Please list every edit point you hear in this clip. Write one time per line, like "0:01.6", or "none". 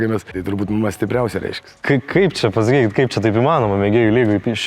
0:01.8